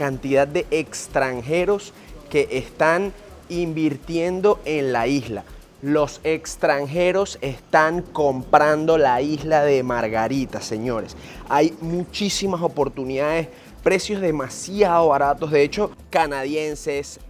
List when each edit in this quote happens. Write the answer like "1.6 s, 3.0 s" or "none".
16.0 s